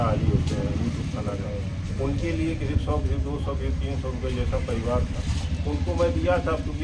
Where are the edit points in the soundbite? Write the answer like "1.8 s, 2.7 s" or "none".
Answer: none